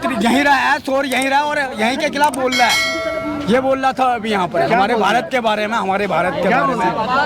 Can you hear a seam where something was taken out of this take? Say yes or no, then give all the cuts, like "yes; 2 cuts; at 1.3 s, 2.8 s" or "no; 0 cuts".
no; 0 cuts